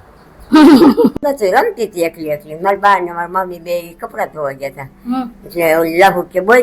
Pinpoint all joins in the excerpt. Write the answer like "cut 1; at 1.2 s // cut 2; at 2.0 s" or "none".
cut 1; at 1.1 s